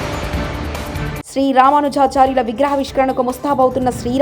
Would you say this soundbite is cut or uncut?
uncut